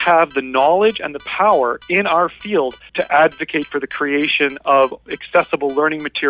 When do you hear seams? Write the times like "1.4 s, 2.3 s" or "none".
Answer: 2.8 s, 5.0 s